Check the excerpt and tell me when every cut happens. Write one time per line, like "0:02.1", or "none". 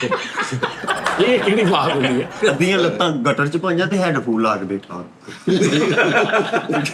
0:02.3